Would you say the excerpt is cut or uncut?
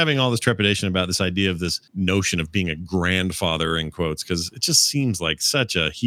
uncut